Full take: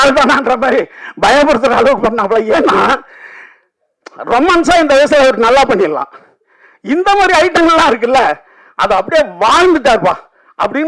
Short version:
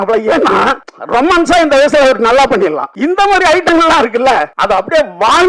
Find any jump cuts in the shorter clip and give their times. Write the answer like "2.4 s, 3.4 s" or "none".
0.9 s, 2.9 s, 4.5 s